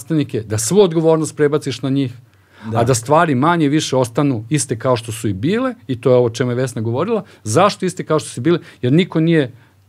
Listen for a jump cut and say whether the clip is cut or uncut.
uncut